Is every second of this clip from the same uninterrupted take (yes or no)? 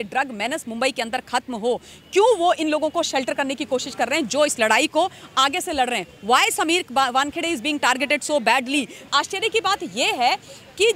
no